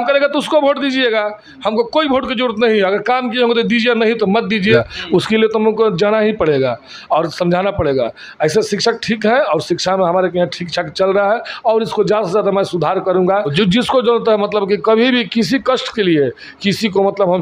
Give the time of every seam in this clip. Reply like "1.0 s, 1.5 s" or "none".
4.8 s, 13.5 s